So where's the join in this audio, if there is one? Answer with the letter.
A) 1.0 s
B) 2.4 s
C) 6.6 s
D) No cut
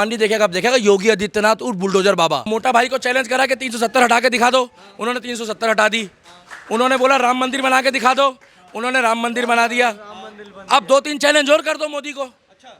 B